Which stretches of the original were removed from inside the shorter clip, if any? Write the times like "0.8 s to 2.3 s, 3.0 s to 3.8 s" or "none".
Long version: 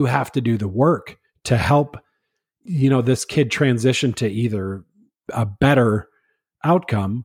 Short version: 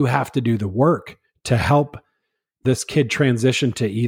2.6 s to 3.0 s